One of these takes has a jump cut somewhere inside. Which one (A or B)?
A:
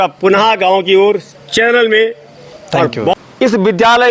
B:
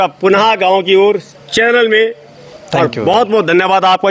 A